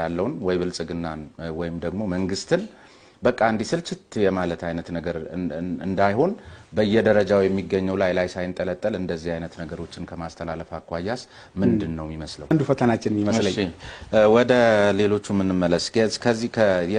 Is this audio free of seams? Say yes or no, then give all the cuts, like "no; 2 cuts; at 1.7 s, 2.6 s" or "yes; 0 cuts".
no; 1 cut; at 12.5 s